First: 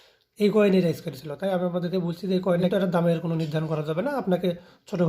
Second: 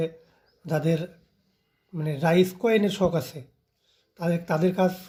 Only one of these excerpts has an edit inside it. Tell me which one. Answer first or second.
first